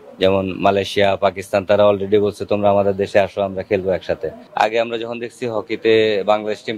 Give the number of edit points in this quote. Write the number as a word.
one